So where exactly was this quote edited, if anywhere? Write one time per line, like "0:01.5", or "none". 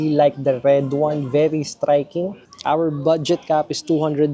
0:02.4